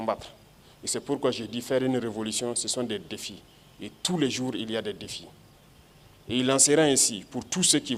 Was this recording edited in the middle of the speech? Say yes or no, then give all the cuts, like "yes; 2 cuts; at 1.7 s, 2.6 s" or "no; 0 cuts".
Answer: no; 0 cuts